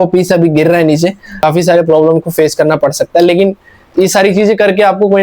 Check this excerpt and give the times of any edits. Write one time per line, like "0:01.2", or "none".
0:01.4